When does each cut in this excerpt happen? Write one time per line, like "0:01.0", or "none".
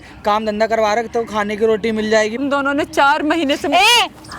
0:02.4